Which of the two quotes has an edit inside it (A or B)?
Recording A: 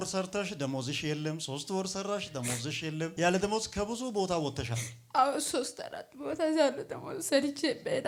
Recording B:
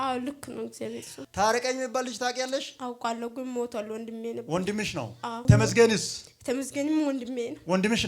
B